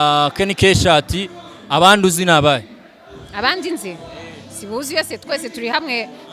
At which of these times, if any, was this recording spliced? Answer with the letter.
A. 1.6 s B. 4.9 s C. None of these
C